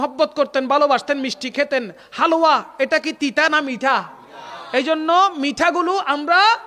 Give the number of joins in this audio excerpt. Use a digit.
0